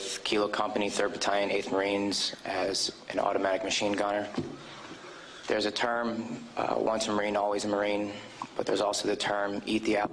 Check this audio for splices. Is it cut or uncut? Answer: cut